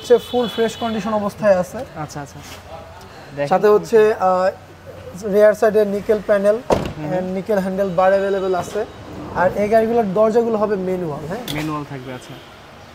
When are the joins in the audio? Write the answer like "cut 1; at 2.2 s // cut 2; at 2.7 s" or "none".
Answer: none

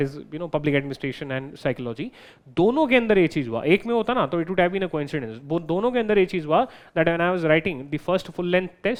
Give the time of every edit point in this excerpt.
none

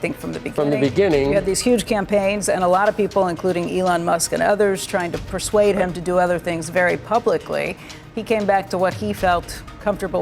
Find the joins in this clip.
cut 1; at 5.2 s

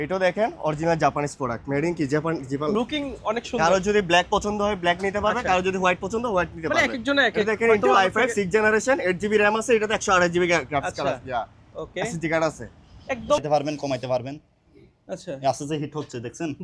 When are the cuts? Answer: cut 1; at 2.7 s // cut 2; at 13.4 s

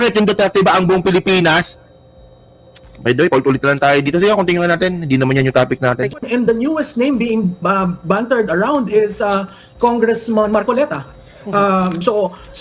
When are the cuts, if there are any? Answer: cut 1; at 6.1 s

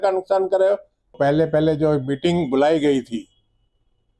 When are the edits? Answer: cut 1; at 1.1 s

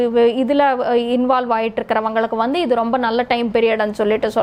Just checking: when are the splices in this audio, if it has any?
none

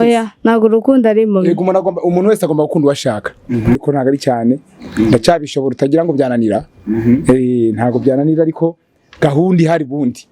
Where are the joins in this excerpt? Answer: cut 1; at 3.8 s

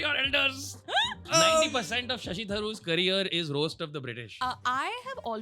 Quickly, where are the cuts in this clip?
cut 1; at 1.3 s // cut 2; at 4.3 s

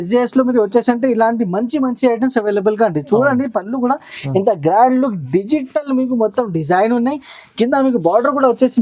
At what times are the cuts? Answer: none

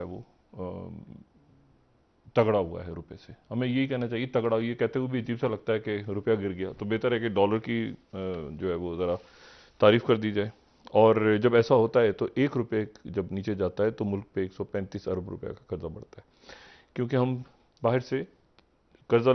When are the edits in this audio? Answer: none

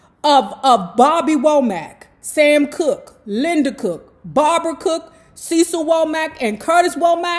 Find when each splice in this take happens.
none

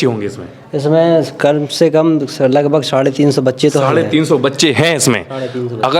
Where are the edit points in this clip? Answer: none

